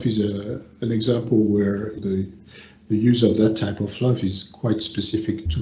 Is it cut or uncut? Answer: cut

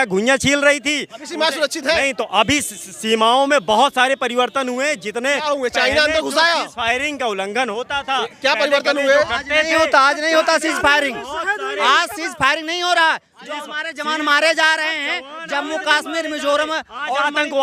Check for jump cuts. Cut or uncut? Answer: uncut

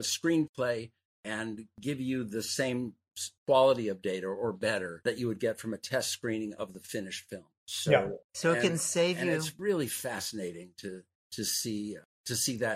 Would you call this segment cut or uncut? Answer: uncut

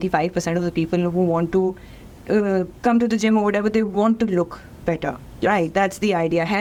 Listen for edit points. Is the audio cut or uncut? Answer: uncut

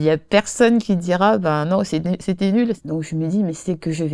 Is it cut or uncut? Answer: cut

